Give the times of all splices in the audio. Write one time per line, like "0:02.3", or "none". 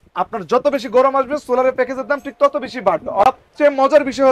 0:03.2